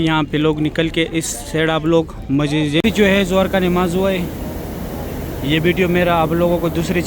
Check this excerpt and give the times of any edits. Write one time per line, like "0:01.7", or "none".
0:02.8